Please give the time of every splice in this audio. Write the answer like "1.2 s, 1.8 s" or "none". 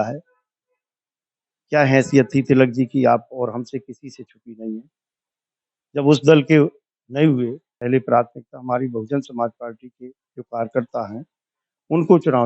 7.8 s